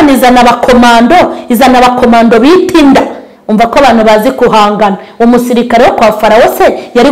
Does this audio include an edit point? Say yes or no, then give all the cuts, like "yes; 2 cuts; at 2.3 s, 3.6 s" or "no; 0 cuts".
no; 0 cuts